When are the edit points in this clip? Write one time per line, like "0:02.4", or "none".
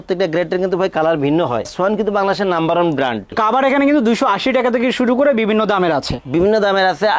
0:03.3
0:06.2